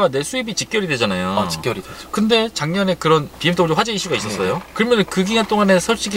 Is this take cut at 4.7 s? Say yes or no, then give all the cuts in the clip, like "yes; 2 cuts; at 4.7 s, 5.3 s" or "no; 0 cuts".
no; 0 cuts